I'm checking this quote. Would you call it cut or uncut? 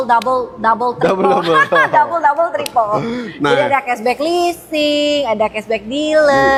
uncut